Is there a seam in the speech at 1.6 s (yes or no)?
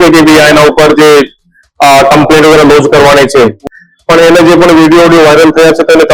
no